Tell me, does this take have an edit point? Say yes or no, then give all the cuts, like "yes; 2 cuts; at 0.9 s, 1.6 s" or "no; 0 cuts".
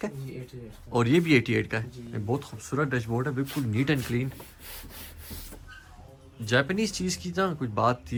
no; 0 cuts